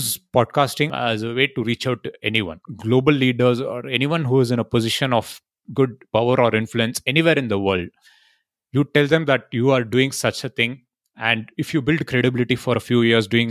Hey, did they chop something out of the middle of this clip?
yes; 2 cuts; at 0.9 s, 2.5 s

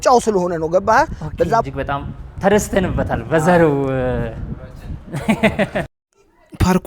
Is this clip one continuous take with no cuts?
no; 1 cut; at 1.6 s

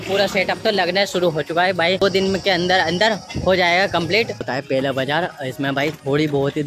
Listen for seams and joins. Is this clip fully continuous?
no; 2 cuts; at 2.0 s, 4.5 s

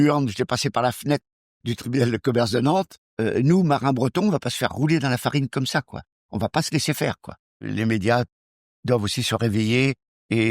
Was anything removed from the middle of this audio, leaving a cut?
yes; 2 cuts; at 3.0 s, 7.6 s

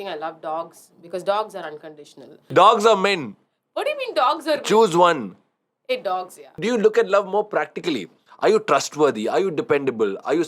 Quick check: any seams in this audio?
yes; 2 cuts; at 2.4 s, 6.6 s

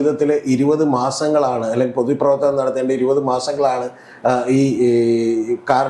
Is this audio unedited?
yes; 0 cuts

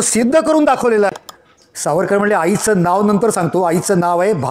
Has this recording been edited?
yes; 1 cut; at 1.1 s

